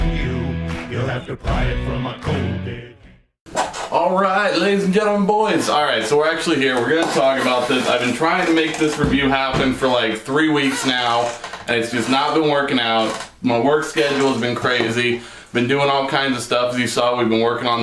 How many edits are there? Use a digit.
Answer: 1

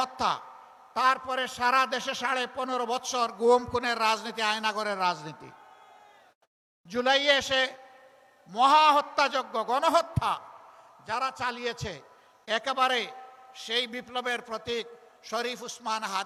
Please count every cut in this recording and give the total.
0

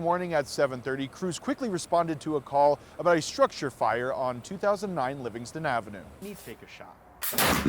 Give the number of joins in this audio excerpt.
1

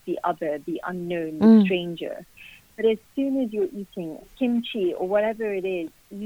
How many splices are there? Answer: 1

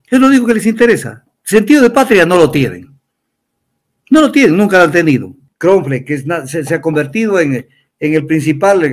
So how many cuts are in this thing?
1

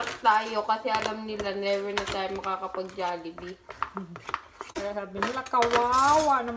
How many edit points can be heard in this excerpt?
0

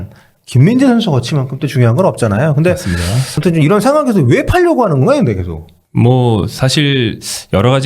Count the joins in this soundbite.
1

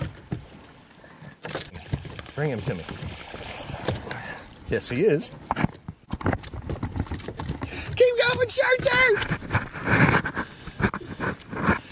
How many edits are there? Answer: 2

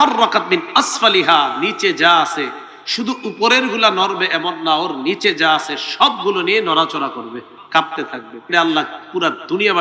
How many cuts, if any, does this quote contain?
2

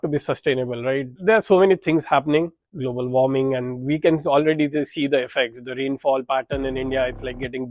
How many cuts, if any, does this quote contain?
2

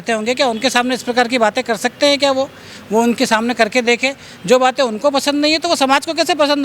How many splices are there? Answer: 0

